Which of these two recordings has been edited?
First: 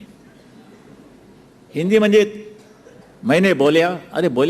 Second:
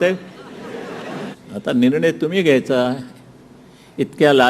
second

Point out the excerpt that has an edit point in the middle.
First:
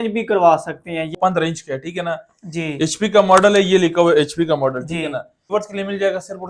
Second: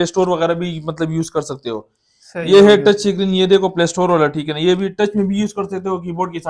first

